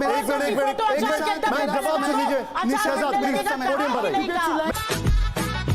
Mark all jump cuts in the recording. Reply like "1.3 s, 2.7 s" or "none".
4.7 s